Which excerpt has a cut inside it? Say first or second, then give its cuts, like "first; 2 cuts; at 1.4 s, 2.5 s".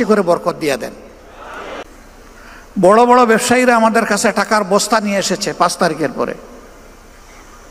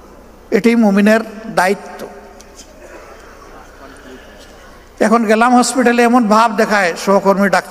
first; 1 cut; at 1.8 s